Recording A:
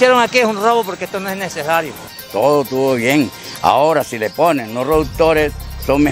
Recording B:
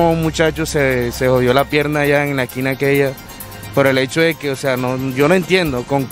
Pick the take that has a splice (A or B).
A